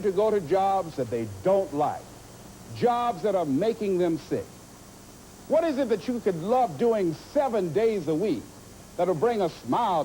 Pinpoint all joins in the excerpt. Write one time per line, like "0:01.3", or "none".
0:04.9